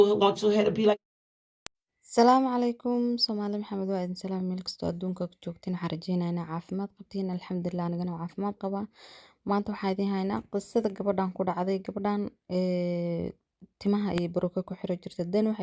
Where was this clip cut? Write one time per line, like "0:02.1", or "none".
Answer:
0:00.9

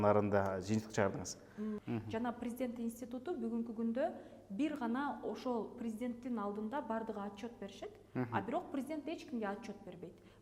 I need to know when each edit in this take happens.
0:01.8

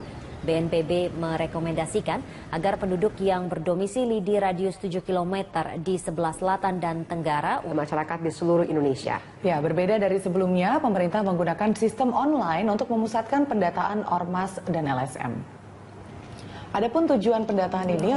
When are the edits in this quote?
none

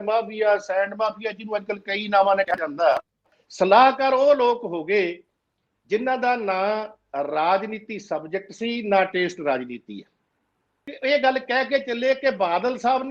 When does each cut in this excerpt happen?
0:03.4
0:10.9

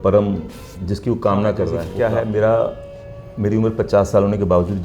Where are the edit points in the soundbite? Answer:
0:01.8

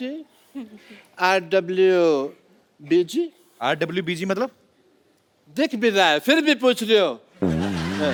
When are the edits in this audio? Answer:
none

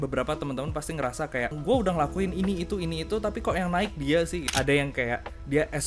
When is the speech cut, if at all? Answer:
0:01.6
0:04.5

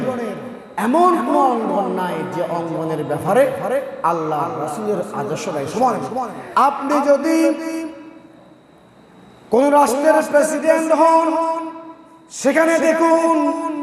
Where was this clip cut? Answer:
0:06.4

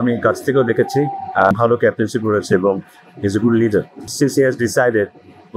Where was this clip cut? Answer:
0:01.5
0:04.0

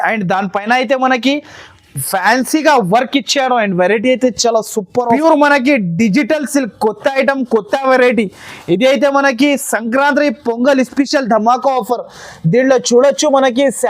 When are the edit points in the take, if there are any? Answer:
0:05.1

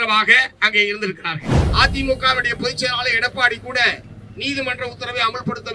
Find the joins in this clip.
0:01.5

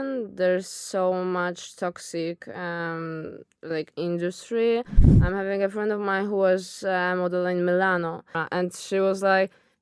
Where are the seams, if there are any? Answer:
0:05.0
0:08.4

